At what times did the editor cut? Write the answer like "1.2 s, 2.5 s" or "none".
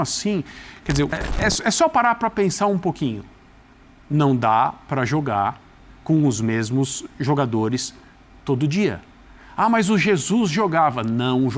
1.1 s